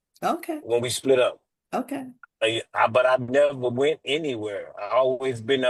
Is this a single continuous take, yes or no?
yes